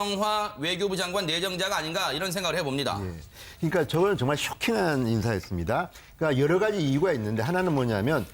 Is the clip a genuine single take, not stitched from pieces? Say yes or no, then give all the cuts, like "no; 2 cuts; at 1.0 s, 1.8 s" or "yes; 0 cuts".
yes; 0 cuts